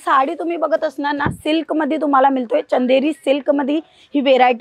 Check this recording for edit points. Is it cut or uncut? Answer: uncut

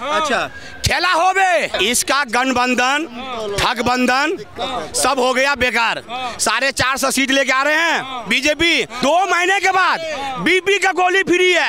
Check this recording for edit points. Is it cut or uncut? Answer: cut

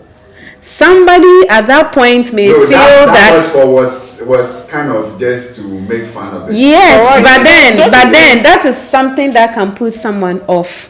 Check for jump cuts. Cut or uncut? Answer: uncut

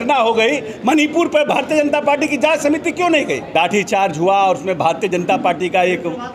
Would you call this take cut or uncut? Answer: cut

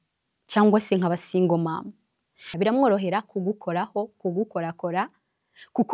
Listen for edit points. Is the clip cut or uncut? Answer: cut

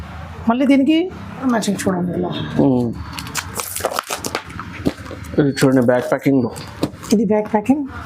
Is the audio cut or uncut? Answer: cut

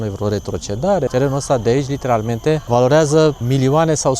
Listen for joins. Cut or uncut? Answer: cut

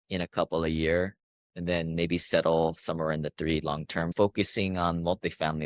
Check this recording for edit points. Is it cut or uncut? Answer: cut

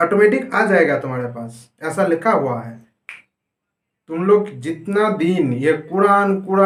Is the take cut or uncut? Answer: uncut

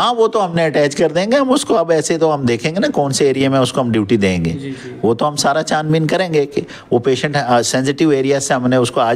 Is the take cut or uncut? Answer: uncut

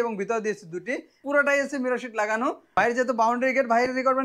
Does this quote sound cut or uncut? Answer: cut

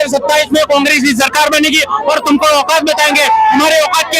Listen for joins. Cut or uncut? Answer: uncut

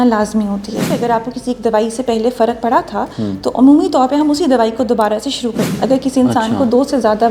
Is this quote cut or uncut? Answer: cut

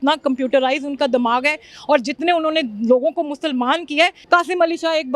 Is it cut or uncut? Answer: cut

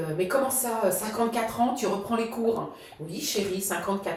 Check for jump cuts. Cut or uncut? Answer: uncut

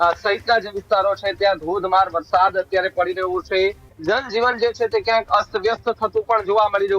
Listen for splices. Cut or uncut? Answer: cut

